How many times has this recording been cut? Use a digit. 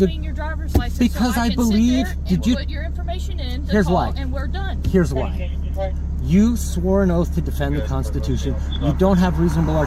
0